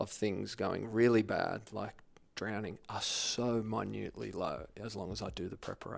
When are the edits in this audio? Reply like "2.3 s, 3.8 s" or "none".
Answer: none